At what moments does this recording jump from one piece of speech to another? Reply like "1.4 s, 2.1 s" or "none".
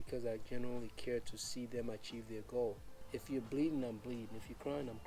2.9 s